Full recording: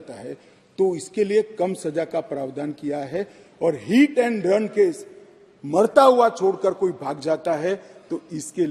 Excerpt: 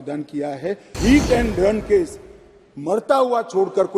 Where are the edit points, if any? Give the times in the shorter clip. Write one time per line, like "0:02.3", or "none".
0:00.9